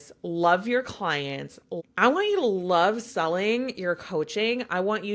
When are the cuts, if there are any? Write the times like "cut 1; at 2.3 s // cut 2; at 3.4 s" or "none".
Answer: cut 1; at 1.7 s